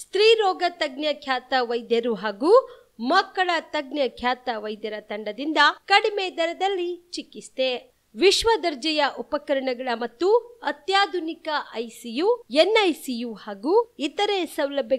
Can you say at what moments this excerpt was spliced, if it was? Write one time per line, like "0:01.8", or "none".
none